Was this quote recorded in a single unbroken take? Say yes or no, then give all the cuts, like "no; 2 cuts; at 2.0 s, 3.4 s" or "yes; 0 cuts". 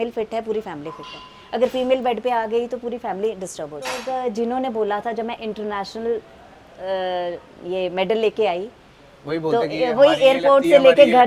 no; 1 cut; at 4.0 s